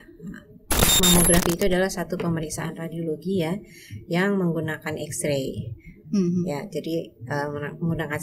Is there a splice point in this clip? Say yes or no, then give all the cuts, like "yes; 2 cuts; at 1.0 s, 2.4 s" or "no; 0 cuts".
yes; 1 cut; at 1.0 s